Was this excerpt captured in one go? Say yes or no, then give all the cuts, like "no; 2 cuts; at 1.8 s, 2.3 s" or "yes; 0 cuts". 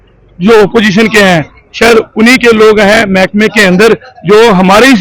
yes; 0 cuts